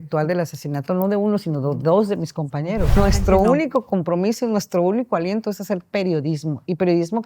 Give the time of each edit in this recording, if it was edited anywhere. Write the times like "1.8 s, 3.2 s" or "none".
3.0 s